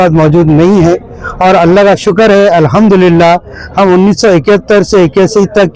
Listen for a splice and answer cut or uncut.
uncut